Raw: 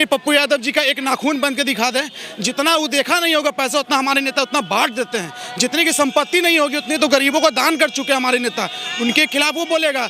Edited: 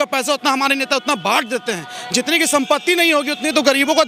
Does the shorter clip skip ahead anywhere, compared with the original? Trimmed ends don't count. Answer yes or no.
no